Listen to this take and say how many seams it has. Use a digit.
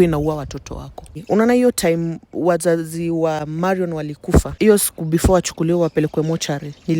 3